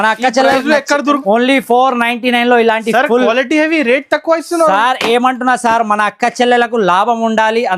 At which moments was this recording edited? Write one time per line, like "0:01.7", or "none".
0:01.2